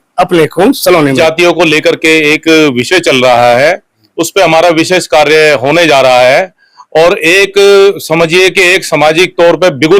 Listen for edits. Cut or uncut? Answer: cut